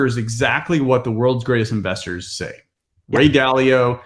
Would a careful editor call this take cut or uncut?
uncut